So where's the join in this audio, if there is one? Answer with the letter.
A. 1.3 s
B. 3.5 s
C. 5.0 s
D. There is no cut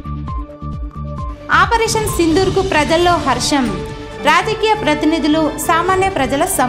D